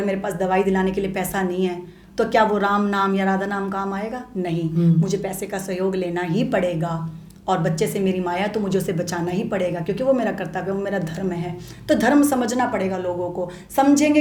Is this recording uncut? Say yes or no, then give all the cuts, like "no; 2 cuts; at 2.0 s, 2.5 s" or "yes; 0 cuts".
yes; 0 cuts